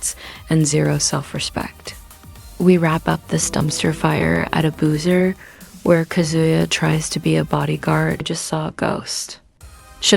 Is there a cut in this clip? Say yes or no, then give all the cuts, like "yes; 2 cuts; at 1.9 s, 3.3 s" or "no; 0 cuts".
yes; 2 cuts; at 5.6 s, 8.3 s